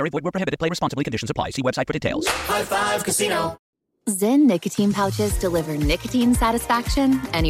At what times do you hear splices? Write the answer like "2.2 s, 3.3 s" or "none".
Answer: 2.1 s, 3.7 s